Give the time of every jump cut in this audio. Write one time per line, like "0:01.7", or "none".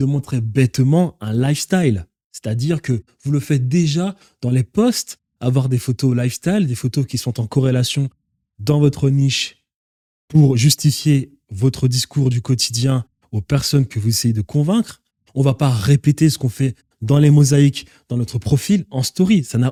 none